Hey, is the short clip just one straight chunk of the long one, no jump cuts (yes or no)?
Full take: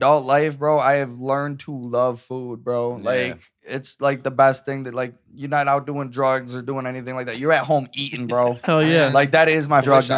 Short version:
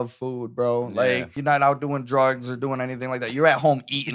no